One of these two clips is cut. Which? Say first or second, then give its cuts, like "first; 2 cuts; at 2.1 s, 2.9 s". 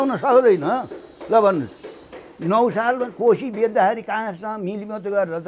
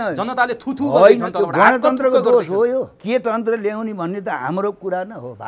second; 1 cut; at 3.0 s